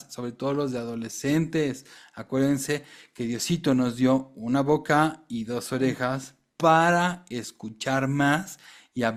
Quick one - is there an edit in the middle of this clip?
no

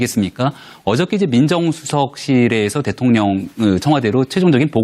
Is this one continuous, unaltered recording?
no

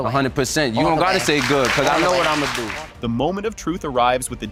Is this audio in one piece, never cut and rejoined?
yes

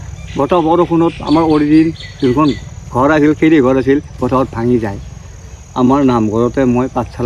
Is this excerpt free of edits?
yes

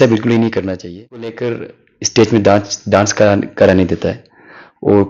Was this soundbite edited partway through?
yes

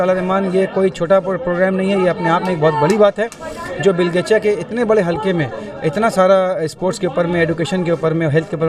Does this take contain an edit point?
no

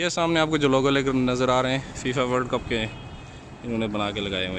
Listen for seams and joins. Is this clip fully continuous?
yes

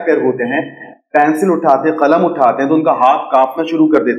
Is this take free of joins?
yes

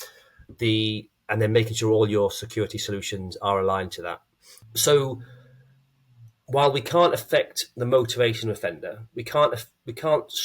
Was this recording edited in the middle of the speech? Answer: yes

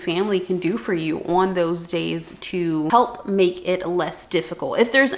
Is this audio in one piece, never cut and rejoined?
no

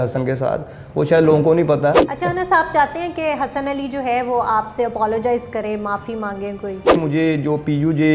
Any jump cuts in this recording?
yes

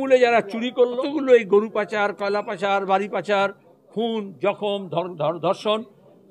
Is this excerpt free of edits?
no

